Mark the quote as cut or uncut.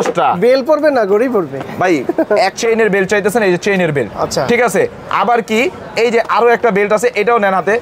cut